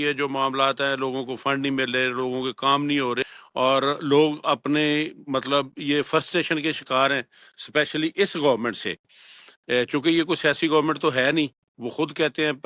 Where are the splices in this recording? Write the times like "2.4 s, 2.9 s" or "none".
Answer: 3.2 s